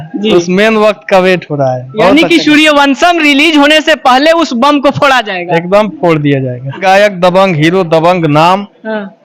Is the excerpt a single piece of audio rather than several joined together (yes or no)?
no